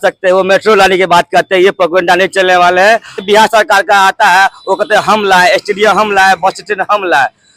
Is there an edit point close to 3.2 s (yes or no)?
yes